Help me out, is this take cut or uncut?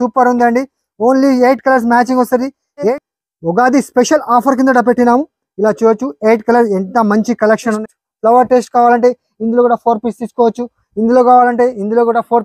cut